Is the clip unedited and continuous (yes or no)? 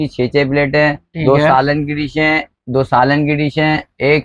yes